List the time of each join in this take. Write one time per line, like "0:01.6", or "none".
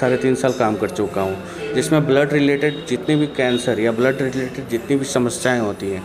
none